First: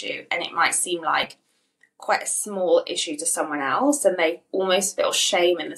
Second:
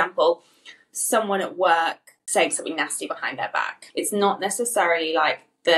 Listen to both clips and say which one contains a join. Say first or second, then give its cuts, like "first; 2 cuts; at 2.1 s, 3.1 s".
second; 2 cuts; at 2.1 s, 3.8 s